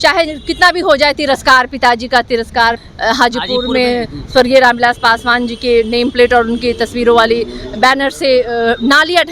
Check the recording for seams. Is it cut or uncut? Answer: cut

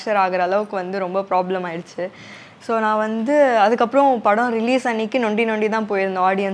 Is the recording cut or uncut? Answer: uncut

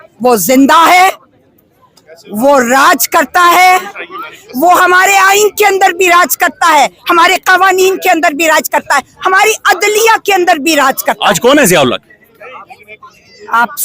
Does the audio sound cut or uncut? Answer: uncut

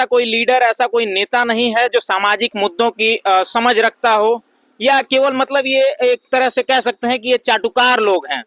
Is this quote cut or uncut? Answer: uncut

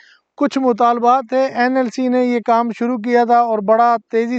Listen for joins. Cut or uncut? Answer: uncut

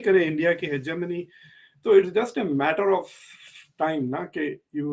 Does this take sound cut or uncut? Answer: uncut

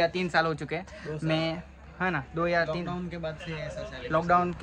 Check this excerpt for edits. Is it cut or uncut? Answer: uncut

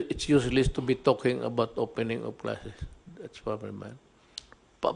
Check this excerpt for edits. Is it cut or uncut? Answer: uncut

